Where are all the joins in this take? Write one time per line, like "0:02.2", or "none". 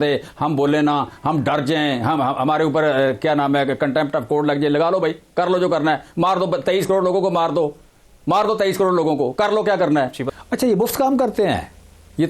0:10.2

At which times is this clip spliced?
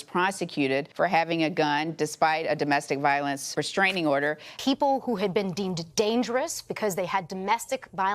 0:04.5

